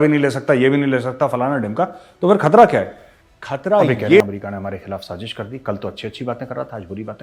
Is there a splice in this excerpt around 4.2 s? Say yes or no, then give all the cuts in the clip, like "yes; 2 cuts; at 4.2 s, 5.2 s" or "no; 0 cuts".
yes; 1 cut; at 4.2 s